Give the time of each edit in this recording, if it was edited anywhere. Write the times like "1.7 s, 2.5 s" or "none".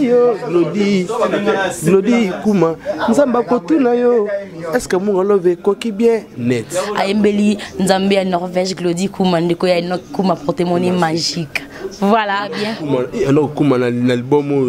6.8 s, 12.7 s